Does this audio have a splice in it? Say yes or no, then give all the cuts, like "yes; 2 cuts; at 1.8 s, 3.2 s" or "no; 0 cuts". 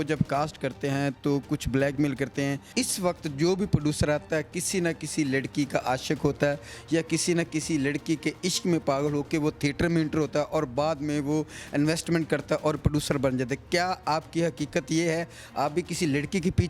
yes; 1 cut; at 2.6 s